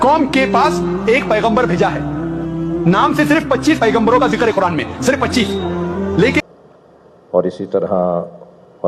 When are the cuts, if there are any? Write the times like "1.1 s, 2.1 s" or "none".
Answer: 6.4 s